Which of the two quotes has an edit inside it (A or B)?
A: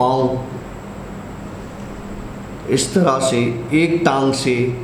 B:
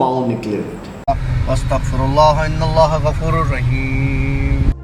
B